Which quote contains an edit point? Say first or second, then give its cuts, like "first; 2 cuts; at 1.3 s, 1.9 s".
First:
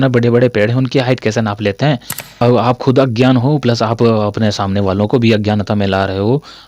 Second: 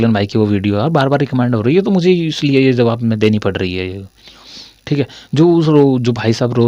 first; 1 cut; at 2.2 s